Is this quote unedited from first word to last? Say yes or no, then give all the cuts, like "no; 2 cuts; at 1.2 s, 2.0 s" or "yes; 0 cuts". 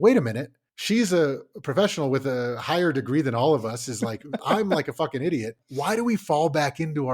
no; 2 cuts; at 4.5 s, 5.6 s